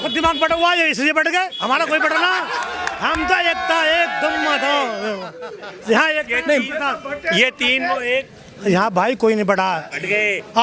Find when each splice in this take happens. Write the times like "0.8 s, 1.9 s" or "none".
none